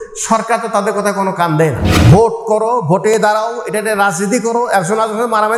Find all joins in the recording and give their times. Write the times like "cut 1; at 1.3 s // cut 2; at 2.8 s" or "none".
cut 1; at 1.9 s